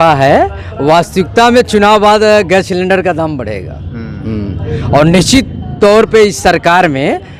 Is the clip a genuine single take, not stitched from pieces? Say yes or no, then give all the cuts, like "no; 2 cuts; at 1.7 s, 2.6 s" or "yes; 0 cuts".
yes; 0 cuts